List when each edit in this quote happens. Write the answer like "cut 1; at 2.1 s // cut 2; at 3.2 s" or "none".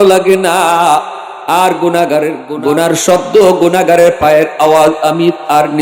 cut 1; at 2.5 s